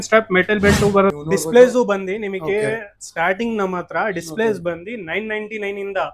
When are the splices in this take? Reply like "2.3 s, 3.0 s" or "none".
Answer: 1.2 s